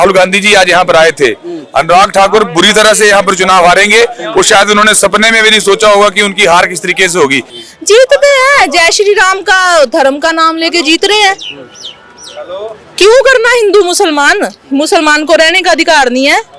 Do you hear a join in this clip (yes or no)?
yes